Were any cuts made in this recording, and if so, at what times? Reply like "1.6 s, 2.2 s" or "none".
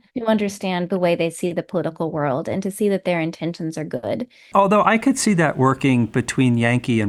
none